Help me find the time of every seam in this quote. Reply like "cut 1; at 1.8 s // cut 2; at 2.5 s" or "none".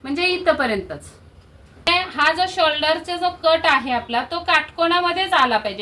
cut 1; at 1.9 s